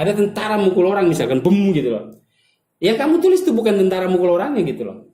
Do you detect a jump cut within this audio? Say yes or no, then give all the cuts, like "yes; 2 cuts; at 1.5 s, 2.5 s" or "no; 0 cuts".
no; 0 cuts